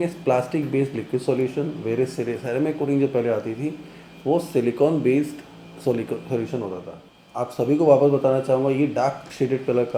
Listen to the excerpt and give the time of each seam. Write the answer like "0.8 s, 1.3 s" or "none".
7.4 s

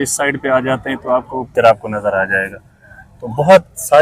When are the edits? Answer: 1.5 s

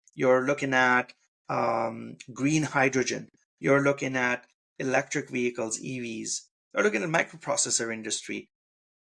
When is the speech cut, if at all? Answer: none

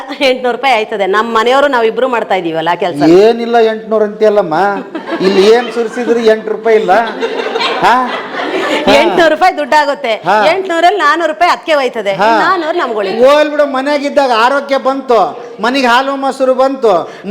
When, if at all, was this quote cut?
none

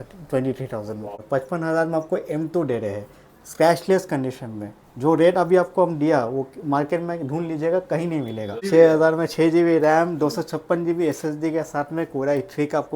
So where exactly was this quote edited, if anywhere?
1.2 s, 8.6 s

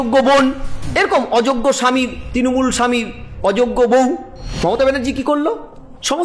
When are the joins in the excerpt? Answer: 4.4 s

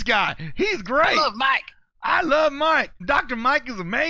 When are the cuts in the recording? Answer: 3.0 s

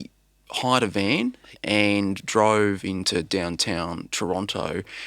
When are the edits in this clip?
1.5 s

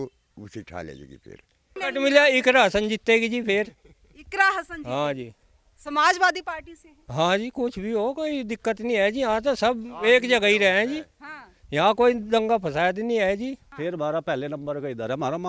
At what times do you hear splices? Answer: 1.8 s, 13.7 s

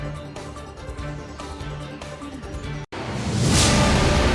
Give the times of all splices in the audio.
1.4 s, 2.9 s

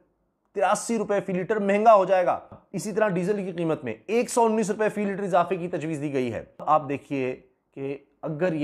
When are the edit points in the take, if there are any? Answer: 2.6 s, 6.5 s

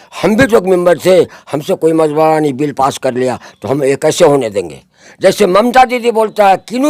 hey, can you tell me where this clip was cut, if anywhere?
none

